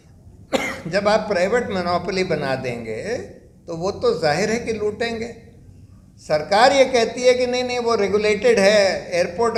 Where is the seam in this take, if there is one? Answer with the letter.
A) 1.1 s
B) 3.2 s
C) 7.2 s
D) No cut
D